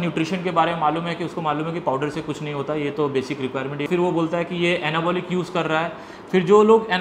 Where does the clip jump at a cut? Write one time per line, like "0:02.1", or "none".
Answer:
0:03.9